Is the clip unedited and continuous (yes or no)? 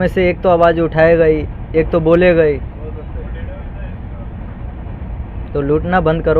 yes